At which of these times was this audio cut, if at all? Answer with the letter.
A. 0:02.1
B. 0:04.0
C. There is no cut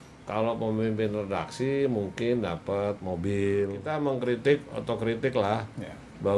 B